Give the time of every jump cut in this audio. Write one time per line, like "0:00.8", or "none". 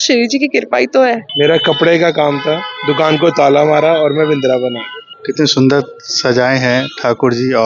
0:01.3
0:05.1